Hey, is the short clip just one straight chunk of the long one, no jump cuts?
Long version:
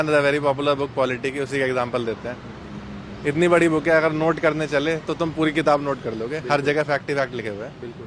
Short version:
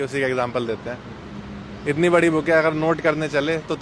yes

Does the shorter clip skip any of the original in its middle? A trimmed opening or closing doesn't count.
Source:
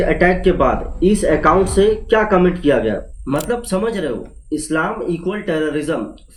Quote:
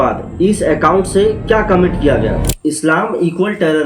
yes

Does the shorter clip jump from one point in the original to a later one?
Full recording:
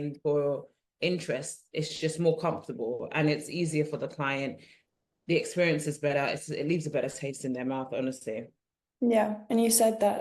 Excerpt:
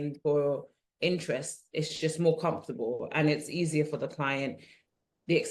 no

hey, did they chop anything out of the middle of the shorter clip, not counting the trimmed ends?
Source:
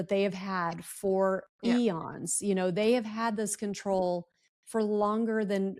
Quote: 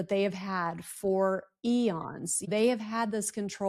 yes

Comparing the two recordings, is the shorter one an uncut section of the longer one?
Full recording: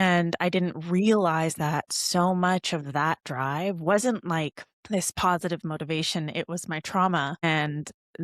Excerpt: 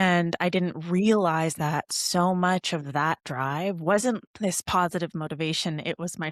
no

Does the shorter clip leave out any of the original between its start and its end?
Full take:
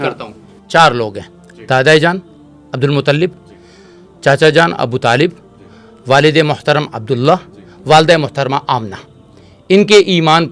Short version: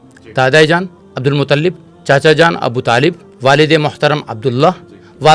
yes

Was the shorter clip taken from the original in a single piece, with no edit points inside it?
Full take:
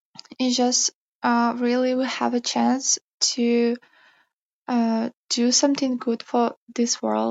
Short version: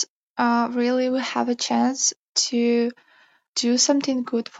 no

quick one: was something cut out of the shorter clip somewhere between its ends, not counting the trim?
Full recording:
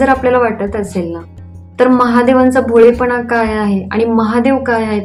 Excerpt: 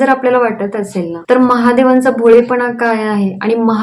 yes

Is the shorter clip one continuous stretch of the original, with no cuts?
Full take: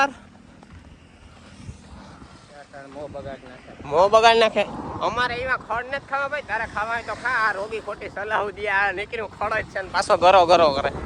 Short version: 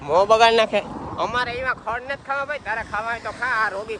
yes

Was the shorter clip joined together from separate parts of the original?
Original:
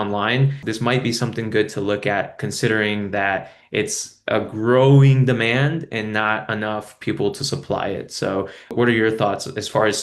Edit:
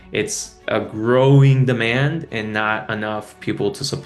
no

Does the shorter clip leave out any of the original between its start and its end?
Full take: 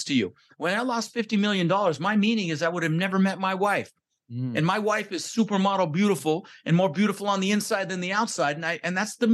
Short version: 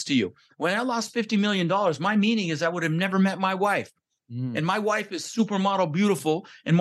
no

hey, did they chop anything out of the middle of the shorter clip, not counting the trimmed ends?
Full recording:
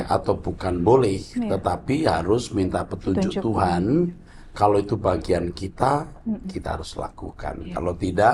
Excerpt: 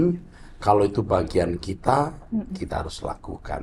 no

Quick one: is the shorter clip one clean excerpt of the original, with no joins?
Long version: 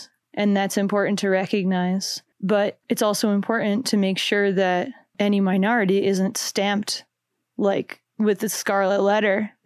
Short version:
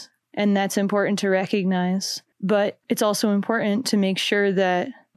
yes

